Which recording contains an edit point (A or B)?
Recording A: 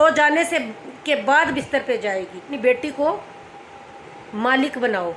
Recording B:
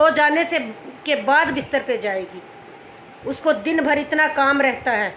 A